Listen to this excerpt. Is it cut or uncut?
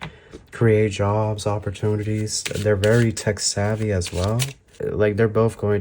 cut